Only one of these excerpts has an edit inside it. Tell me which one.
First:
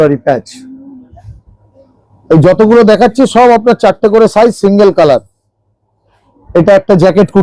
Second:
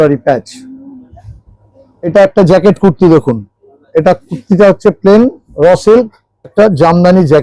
second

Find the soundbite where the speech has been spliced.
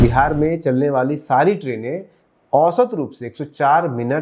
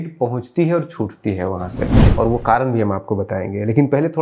second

